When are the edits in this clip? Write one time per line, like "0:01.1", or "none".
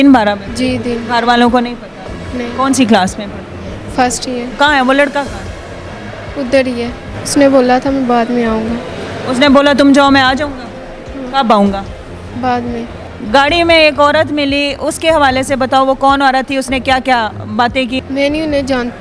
0:04.5
0:07.1
0:13.0
0:18.0